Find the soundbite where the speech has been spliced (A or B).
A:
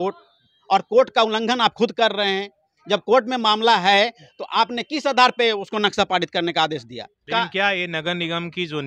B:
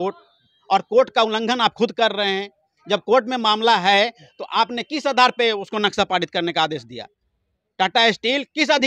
A